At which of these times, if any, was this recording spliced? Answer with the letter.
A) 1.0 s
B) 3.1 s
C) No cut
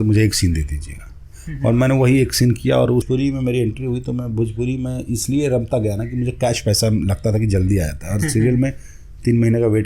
B